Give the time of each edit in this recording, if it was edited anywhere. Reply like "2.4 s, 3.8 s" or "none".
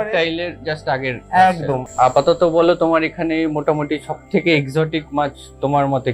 1.9 s